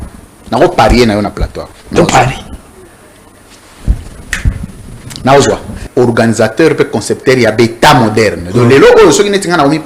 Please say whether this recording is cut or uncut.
cut